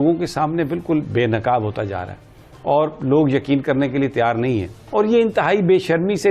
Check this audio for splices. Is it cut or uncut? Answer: cut